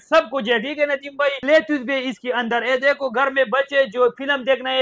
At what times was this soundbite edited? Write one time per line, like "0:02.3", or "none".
0:01.4